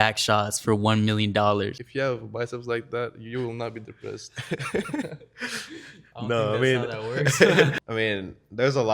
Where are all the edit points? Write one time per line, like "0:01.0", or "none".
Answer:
0:01.8
0:07.8